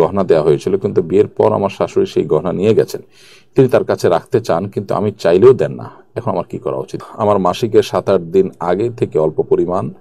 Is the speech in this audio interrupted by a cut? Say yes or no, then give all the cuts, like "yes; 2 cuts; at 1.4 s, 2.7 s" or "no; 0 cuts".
yes; 1 cut; at 6.9 s